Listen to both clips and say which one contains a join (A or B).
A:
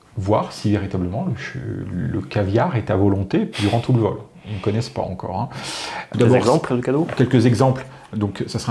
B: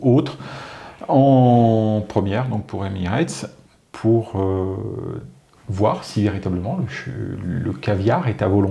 A